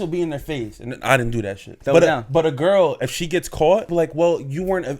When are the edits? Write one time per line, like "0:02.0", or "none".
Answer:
0:01.7
0:03.9